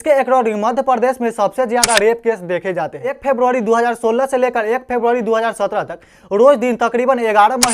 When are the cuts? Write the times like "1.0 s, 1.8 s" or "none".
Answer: 3.2 s